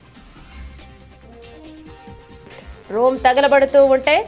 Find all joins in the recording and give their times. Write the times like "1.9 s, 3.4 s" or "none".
0.8 s, 2.3 s